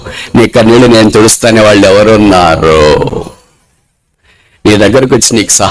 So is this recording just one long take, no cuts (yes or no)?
yes